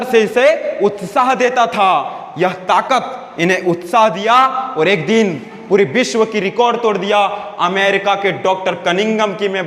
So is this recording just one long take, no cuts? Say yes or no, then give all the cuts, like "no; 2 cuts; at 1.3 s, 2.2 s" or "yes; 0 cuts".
yes; 0 cuts